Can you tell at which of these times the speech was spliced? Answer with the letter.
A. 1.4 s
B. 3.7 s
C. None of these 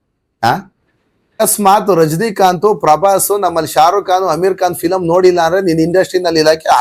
A